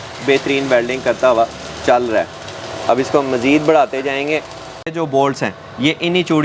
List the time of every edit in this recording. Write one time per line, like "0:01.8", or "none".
0:04.9